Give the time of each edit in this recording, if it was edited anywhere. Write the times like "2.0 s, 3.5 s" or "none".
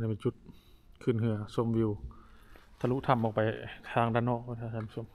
none